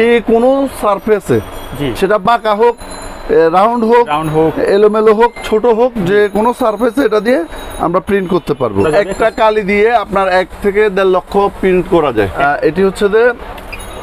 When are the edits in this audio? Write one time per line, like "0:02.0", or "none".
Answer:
0:08.9
0:12.3